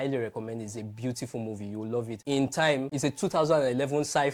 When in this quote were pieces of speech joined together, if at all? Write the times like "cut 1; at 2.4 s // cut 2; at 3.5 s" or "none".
none